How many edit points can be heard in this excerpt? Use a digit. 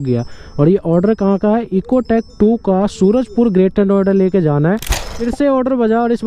1